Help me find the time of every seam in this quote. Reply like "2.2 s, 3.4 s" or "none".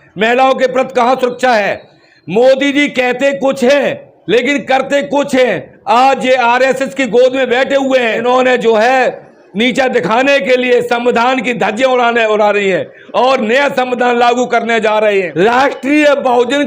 8.2 s, 15.3 s